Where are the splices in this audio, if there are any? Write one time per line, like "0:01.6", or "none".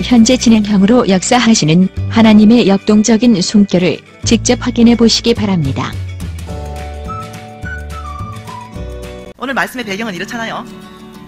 0:01.4